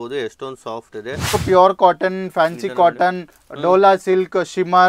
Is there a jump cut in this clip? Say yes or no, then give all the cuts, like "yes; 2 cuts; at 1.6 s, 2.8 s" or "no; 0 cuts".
yes; 1 cut; at 1.4 s